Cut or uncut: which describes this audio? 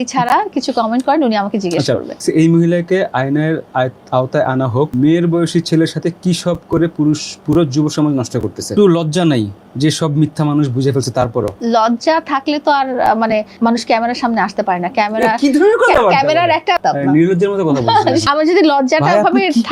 cut